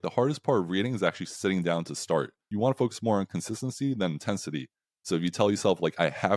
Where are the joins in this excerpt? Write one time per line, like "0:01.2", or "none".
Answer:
0:02.4